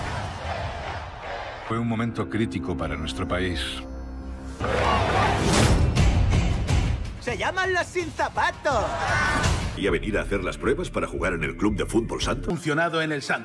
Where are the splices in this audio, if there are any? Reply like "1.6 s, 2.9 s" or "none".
1.1 s